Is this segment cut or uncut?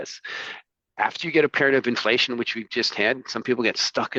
uncut